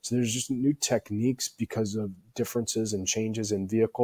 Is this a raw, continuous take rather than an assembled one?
yes; 0 cuts

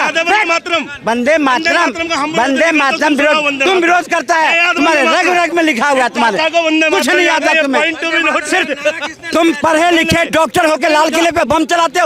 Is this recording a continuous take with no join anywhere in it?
yes; 0 cuts

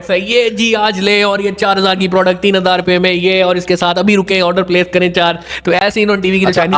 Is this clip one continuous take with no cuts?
yes; 0 cuts

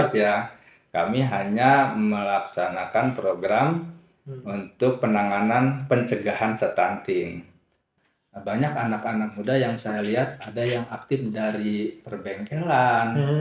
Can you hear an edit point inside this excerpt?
yes; 1 cut; at 7.9 s

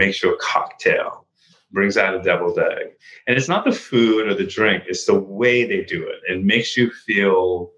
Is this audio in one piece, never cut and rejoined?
no; 1 cut; at 6.2 s

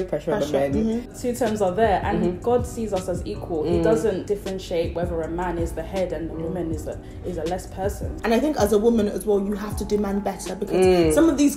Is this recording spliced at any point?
yes; 2 cuts; at 1.1 s, 8.1 s

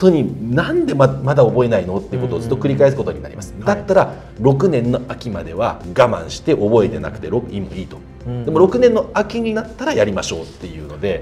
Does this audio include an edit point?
no; 0 cuts

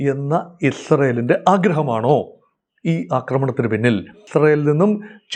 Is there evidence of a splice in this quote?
yes; 1 cut; at 4.2 s

